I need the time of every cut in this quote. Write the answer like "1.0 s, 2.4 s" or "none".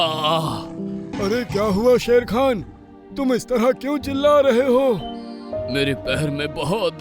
1.1 s